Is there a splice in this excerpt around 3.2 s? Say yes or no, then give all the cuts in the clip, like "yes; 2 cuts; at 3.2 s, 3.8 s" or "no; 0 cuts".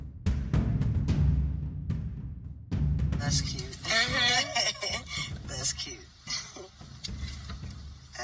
yes; 1 cut; at 3.2 s